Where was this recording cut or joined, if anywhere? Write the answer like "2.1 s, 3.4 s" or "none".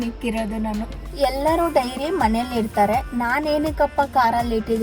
1.0 s